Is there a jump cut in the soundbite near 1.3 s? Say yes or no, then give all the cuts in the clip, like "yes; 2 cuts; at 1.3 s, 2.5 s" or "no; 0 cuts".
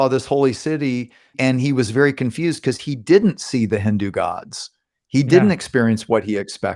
yes; 1 cut; at 1.3 s